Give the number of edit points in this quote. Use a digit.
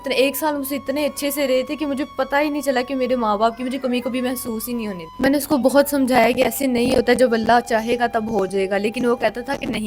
1